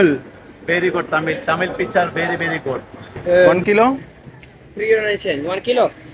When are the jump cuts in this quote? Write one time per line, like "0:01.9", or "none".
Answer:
0:03.5